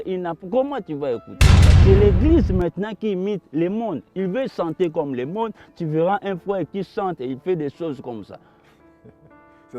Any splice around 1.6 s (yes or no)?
yes